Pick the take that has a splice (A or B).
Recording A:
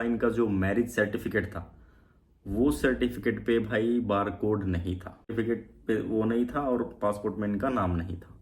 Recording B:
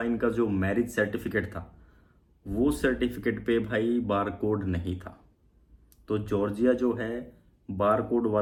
A